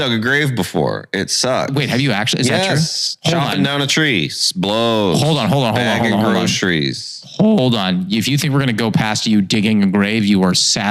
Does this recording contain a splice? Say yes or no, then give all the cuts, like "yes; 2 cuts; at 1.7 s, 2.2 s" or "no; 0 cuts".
yes; 1 cut; at 1.7 s